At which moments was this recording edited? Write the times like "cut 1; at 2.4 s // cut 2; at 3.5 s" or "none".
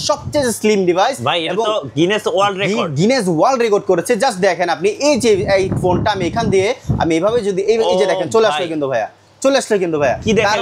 none